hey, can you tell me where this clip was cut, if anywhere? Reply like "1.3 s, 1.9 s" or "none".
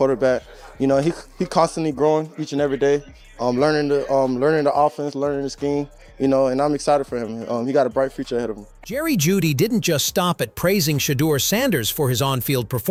none